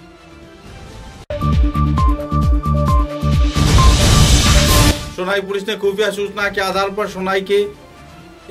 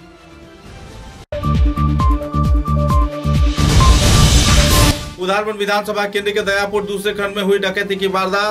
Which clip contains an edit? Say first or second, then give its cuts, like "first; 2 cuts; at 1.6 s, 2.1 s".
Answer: second; 2 cuts; at 1.3 s, 4.9 s